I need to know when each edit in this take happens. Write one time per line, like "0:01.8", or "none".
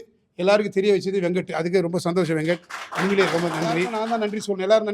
0:04.0